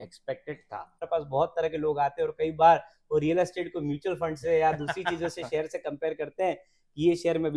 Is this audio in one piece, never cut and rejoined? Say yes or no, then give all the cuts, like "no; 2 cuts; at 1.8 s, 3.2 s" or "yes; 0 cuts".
no; 1 cut; at 1.1 s